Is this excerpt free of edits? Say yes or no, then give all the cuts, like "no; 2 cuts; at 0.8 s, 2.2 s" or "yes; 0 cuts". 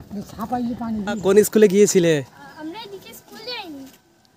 no; 1 cut; at 1.2 s